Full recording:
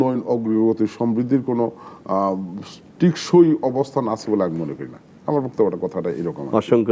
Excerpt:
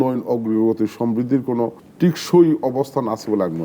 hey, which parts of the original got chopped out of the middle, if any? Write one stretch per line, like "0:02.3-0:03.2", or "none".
0:01.8-0:02.8